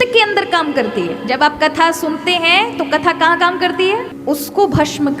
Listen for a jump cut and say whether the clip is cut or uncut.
cut